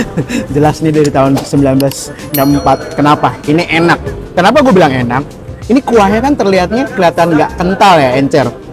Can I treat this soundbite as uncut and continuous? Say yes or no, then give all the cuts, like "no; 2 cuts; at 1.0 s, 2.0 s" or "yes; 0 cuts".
yes; 0 cuts